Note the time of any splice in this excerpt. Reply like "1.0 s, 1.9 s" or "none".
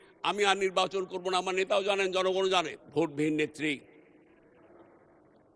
2.8 s